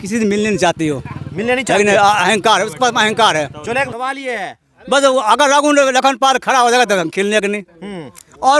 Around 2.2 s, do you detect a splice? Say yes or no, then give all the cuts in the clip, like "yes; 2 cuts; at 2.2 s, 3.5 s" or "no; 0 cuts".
no; 1 cut; at 3.9 s